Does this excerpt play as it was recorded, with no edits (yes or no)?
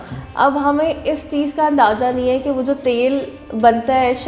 yes